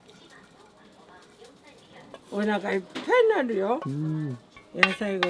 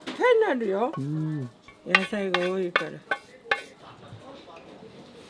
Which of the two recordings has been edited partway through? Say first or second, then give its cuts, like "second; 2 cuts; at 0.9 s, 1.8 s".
second; 1 cut; at 3.8 s